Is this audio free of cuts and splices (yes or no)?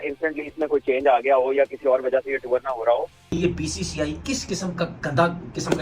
no